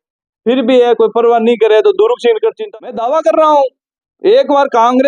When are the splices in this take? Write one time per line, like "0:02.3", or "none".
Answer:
0:02.7